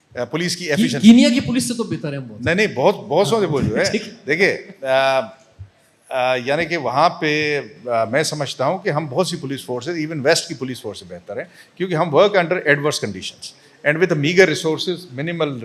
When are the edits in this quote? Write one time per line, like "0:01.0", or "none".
none